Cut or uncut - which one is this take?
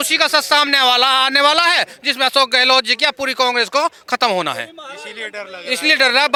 uncut